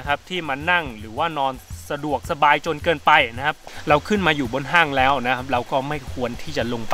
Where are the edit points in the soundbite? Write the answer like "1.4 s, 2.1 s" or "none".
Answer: 3.6 s